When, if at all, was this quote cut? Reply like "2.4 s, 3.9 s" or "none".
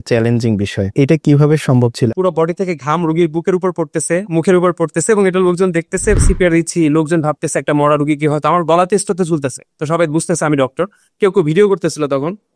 0.9 s, 2.1 s, 6.2 s